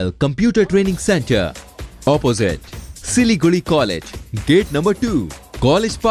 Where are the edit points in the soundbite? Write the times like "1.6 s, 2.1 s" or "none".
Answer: none